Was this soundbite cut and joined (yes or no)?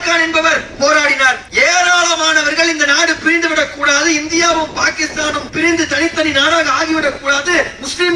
yes